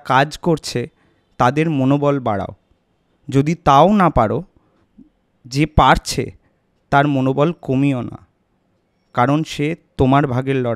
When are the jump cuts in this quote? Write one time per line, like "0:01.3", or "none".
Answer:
none